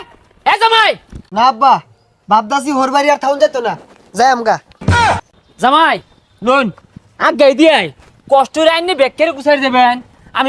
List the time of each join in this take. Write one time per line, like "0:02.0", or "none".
none